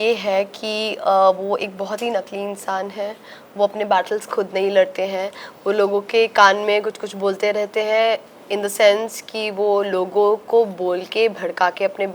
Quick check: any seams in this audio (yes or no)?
no